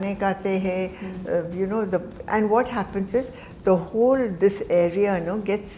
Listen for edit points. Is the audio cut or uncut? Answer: uncut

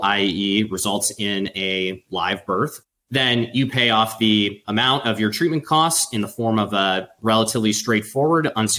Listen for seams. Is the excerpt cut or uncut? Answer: uncut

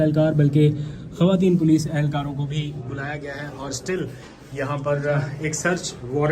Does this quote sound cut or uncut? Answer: uncut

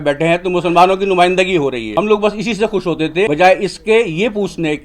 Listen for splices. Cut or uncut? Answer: cut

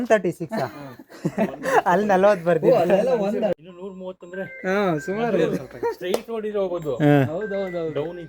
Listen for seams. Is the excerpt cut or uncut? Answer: cut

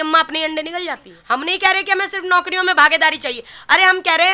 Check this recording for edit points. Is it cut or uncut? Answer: cut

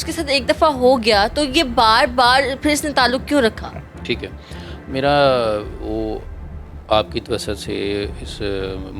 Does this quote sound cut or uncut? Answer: uncut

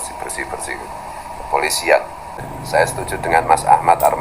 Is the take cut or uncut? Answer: cut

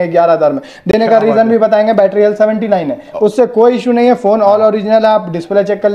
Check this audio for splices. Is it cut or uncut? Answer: uncut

